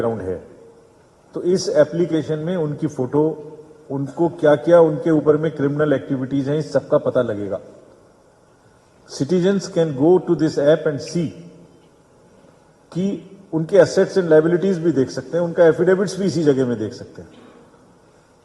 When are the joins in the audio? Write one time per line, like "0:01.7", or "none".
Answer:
none